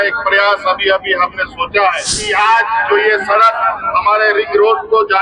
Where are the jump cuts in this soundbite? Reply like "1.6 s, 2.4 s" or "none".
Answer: 2.3 s